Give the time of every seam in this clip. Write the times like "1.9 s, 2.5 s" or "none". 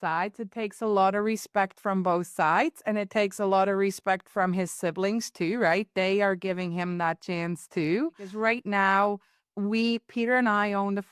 8.3 s